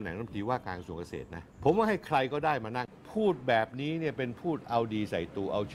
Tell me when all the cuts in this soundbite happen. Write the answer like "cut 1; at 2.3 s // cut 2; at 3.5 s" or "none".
cut 1; at 1.4 s // cut 2; at 2.8 s